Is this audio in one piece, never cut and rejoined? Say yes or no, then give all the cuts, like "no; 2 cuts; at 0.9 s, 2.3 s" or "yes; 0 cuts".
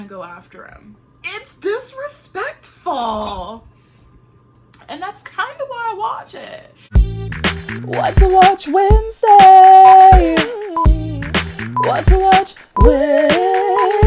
no; 1 cut; at 6.8 s